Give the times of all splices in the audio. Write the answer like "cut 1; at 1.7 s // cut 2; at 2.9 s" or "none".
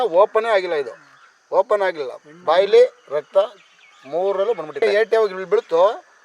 cut 1; at 4.8 s